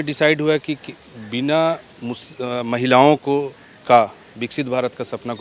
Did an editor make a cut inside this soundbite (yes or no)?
no